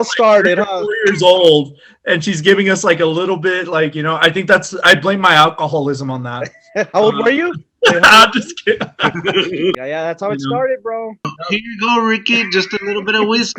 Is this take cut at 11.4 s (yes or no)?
yes